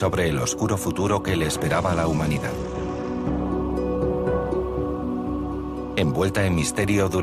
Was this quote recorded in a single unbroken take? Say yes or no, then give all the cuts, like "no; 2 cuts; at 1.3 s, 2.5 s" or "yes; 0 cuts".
yes; 0 cuts